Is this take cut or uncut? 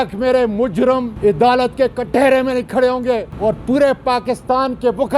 cut